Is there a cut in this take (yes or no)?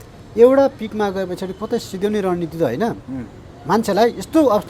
no